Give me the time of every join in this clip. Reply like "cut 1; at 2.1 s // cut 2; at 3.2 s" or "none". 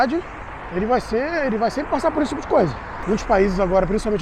cut 1; at 2.9 s